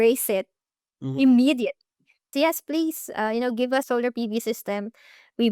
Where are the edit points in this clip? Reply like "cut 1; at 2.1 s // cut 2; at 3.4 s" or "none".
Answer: cut 1; at 2.3 s // cut 2; at 3.9 s